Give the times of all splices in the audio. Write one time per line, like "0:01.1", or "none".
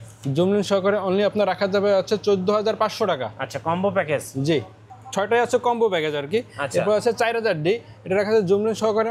none